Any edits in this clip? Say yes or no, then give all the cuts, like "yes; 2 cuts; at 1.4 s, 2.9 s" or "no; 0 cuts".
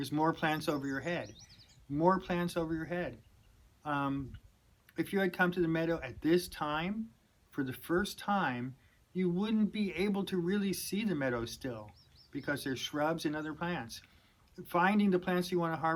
no; 0 cuts